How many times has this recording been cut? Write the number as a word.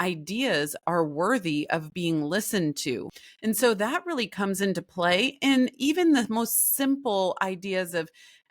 one